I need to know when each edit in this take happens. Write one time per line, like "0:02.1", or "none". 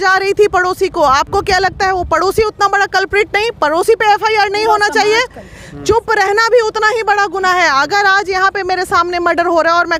none